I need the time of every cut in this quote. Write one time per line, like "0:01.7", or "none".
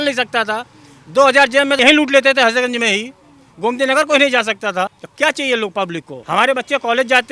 0:05.0
0:06.1

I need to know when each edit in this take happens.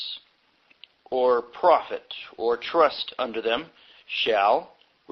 0:03.6

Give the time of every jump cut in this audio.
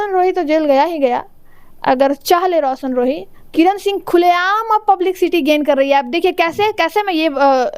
0:03.3

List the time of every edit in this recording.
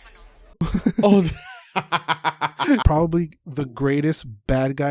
0:02.8

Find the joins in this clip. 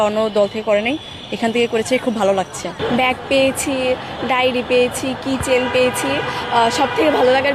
none

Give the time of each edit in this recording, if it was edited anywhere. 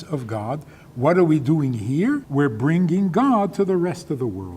0:02.3

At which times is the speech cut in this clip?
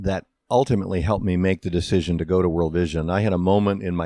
none

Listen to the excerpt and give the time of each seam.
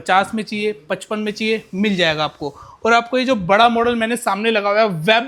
none

